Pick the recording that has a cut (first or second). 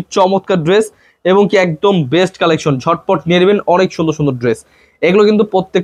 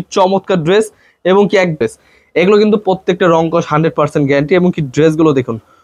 second